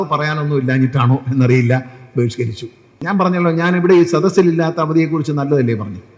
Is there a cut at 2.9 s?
yes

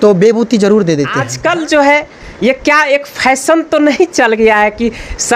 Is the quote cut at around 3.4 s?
no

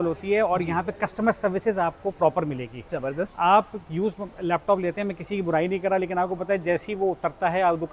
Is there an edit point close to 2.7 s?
no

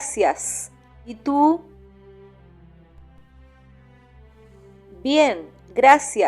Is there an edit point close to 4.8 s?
no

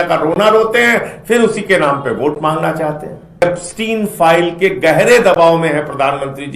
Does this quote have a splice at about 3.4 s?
yes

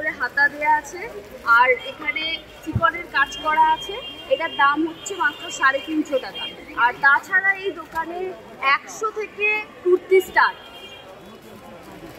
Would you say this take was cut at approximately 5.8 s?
no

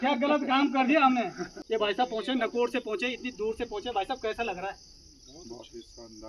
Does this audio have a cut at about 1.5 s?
yes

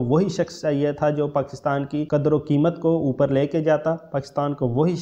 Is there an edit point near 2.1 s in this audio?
yes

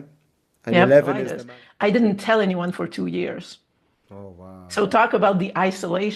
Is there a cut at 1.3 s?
yes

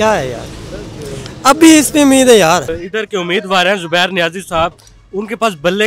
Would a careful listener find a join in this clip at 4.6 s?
no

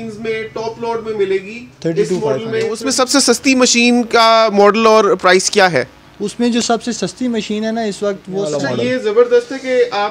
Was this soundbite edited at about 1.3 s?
no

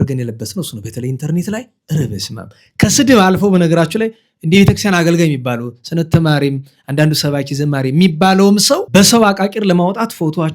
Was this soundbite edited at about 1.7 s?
yes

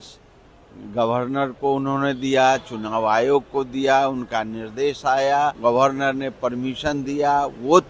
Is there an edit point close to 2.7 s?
no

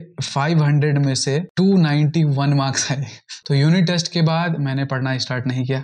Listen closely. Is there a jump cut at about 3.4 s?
yes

